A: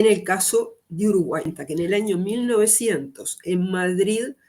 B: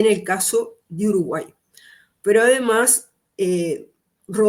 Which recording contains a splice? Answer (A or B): A